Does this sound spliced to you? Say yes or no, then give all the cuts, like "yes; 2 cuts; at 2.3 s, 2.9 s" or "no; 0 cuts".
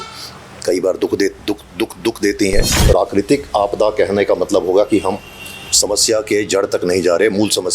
yes; 1 cut; at 2.7 s